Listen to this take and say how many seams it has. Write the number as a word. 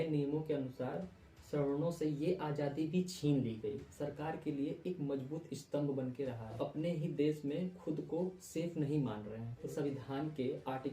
three